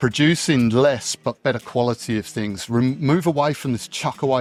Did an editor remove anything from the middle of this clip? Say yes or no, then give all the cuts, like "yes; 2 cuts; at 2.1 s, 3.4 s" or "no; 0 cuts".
no; 0 cuts